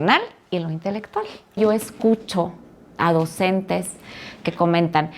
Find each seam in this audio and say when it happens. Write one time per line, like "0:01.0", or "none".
0:01.6